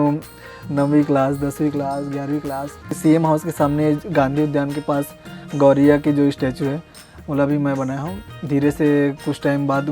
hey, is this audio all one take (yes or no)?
no